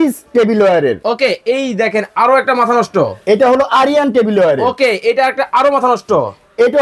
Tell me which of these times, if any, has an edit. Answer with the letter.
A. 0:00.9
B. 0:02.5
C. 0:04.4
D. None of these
D